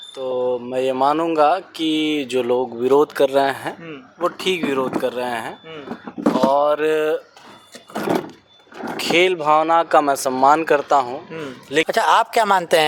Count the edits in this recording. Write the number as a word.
one